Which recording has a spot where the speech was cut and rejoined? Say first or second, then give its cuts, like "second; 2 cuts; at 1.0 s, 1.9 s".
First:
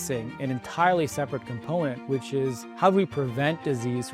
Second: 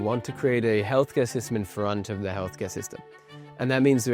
first; 1 cut; at 2.6 s